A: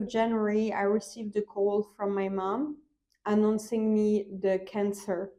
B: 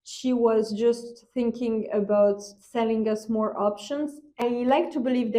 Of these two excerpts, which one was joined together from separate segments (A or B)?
B